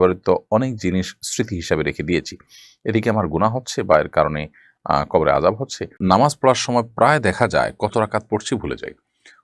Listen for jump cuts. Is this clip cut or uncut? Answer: cut